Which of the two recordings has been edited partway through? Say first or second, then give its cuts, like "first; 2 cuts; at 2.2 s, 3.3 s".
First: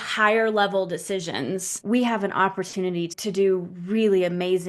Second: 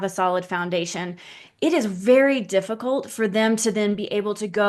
first; 2 cuts; at 1.7 s, 3.1 s